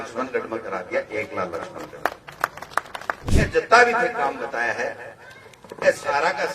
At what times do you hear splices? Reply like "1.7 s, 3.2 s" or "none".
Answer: 3.2 s